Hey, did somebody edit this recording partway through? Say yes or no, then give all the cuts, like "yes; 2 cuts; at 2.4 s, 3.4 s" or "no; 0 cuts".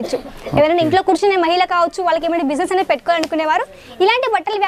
no; 0 cuts